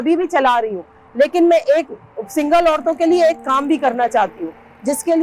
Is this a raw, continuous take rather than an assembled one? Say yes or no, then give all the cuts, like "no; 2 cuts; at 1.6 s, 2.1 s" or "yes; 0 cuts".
yes; 0 cuts